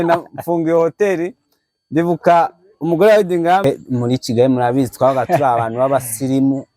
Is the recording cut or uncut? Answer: cut